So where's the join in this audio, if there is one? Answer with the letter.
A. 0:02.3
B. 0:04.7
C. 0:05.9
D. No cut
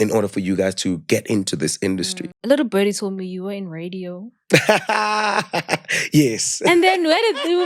A